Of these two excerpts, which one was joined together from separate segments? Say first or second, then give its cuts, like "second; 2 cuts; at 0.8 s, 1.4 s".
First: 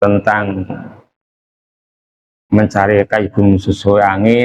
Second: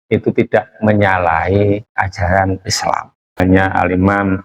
second; 1 cut; at 3.4 s